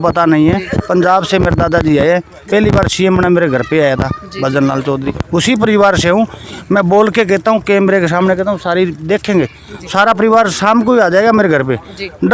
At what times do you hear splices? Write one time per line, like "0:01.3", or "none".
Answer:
none

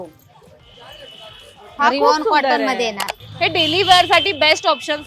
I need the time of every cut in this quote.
0:03.2

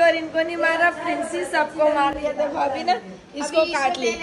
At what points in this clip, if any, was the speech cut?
none

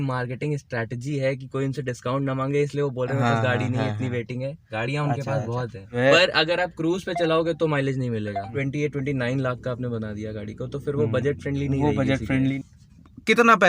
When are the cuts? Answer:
0:05.8
0:08.6
0:12.4

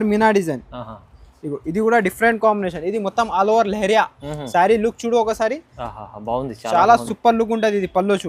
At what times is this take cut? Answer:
none

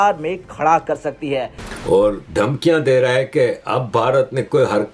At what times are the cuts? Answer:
0:01.6

